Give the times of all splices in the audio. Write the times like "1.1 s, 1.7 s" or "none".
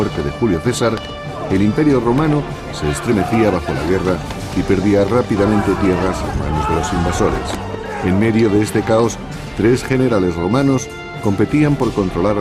5.6 s